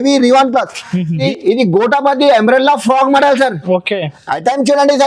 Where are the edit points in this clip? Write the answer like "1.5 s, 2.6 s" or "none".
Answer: 1.2 s